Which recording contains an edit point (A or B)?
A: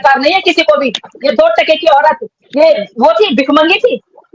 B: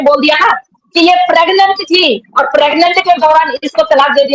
A